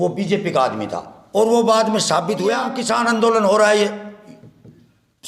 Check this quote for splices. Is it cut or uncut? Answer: cut